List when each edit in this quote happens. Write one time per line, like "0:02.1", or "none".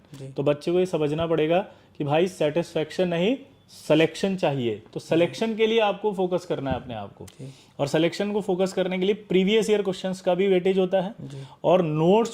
none